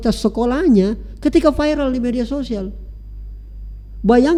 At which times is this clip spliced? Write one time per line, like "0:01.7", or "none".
none